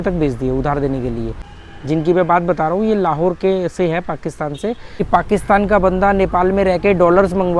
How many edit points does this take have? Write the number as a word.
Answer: two